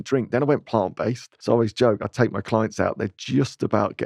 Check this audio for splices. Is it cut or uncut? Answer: cut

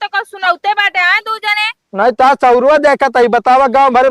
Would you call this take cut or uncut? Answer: uncut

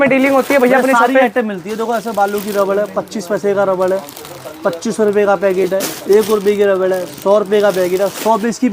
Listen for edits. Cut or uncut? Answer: uncut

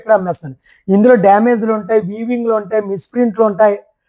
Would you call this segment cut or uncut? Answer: uncut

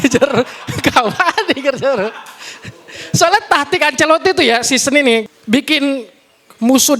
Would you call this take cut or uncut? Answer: cut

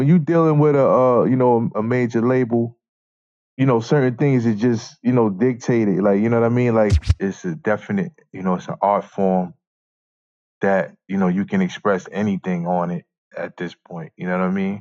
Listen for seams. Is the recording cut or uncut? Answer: cut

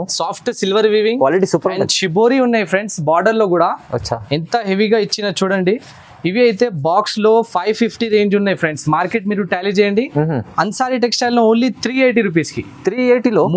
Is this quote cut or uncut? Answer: uncut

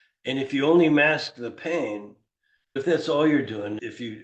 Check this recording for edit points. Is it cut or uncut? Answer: cut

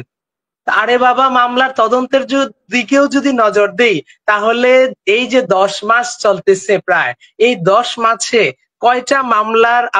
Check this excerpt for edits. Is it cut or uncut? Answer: uncut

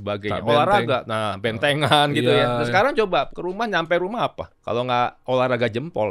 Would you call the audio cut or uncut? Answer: cut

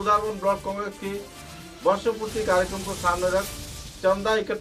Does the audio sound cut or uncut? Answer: uncut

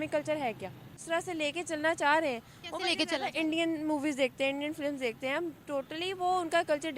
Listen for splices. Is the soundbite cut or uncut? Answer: cut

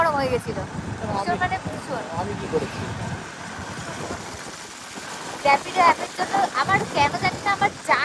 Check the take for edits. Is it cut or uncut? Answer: uncut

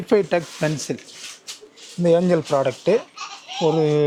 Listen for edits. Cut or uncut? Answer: uncut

